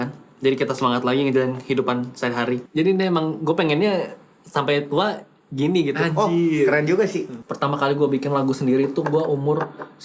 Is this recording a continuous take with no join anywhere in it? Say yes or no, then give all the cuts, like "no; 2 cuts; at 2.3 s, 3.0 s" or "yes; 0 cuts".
no; 2 cuts; at 2.7 s, 7.4 s